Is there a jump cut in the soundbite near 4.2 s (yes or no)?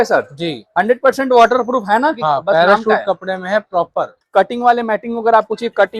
yes